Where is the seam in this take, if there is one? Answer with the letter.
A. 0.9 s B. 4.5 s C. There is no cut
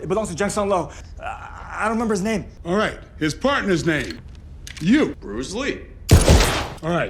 A